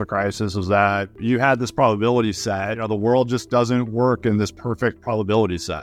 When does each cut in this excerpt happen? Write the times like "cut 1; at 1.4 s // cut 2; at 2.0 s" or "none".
cut 1; at 1.2 s // cut 2; at 2.8 s